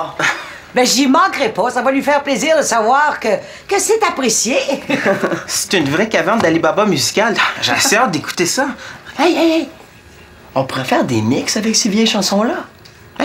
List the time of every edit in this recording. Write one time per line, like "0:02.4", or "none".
none